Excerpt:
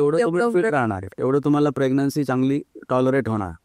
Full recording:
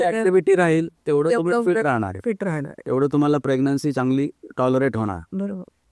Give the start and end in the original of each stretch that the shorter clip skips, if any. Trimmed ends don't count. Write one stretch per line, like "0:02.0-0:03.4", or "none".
0:02.1-0:02.7